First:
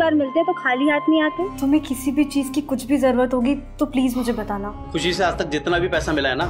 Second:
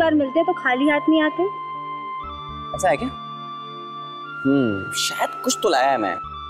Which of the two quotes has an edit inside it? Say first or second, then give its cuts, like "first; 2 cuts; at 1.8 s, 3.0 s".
first; 2 cuts; at 1.5 s, 4.8 s